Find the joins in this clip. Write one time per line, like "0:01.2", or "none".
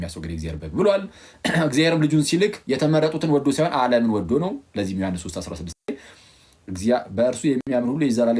0:05.9
0:07.6

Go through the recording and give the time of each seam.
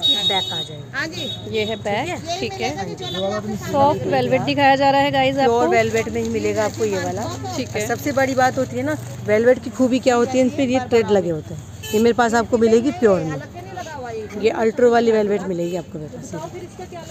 none

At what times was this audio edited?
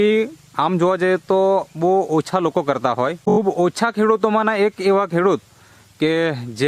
0:03.2

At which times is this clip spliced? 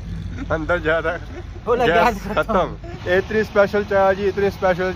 0:02.9

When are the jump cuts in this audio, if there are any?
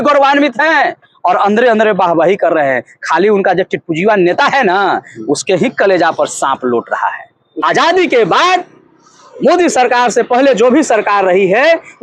0:07.6

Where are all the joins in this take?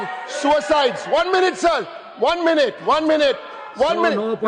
none

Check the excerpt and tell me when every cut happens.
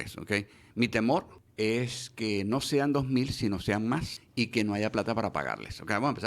0:01.4
0:04.2

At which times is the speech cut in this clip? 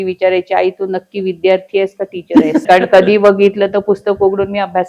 0:02.6

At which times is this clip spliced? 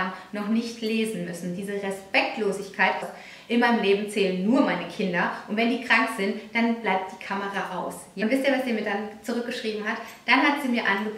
0:03.1
0:08.1

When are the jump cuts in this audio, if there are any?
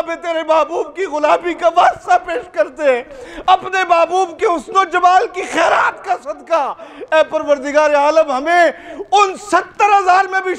none

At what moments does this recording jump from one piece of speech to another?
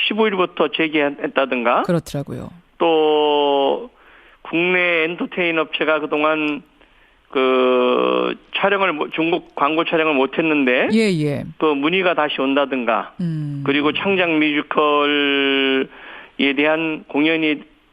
0:02.1

